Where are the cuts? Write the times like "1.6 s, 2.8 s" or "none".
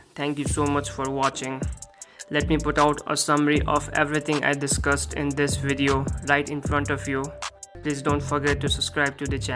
7.7 s